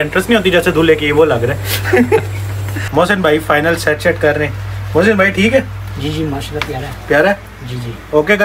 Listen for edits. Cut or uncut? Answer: uncut